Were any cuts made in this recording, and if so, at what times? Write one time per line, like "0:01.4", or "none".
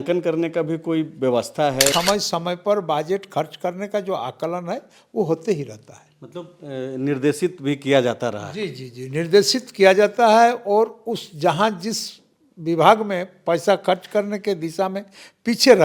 0:01.9